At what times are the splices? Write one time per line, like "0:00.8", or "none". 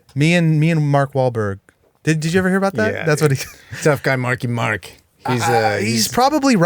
0:03.8